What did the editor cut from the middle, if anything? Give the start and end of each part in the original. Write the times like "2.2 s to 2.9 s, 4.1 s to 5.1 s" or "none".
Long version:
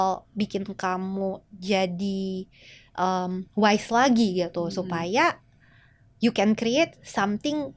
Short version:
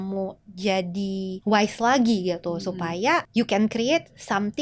2.4 s to 3.5 s, 5.4 s to 6.1 s